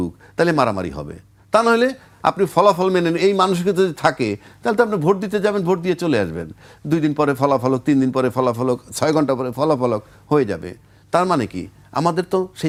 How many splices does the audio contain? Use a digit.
0